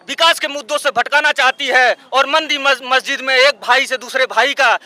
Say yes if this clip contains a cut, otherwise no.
no